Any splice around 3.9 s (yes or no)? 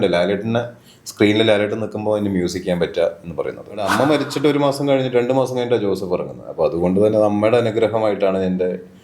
yes